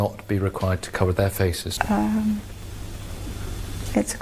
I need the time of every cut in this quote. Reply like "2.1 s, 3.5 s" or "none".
1.6 s

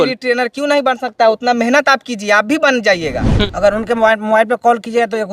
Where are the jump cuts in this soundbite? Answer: 3.3 s

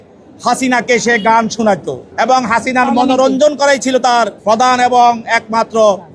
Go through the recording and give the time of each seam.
2.0 s, 3.9 s

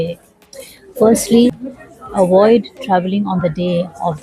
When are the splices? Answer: 1.6 s

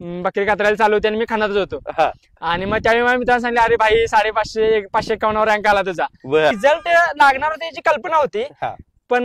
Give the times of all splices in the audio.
6.6 s

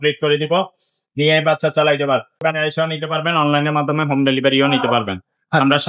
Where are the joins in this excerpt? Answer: 2.4 s

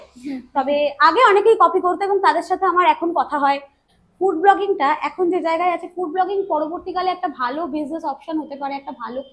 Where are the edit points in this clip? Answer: 3.8 s

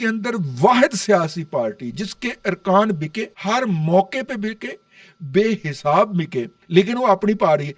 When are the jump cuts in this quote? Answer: 3.3 s, 6.5 s

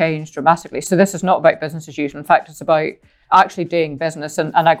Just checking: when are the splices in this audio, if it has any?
0.8 s, 3.3 s

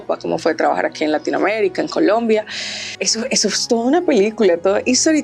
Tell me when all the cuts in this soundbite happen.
3.1 s

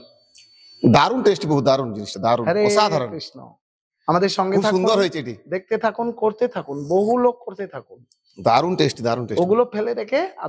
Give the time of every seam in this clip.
none

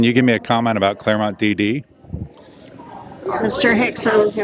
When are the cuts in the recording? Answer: none

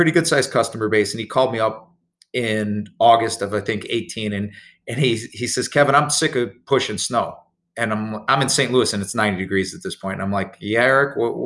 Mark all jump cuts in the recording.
none

